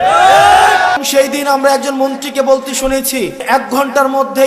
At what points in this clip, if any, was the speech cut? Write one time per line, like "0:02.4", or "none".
0:01.0
0:03.4